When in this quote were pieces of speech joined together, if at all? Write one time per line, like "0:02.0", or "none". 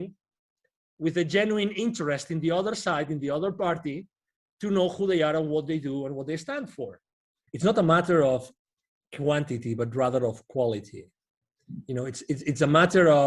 0:07.4